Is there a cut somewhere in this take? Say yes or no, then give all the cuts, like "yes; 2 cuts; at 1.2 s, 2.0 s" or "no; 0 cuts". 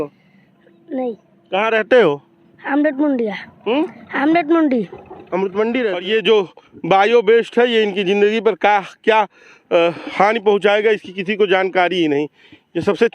yes; 1 cut; at 6.0 s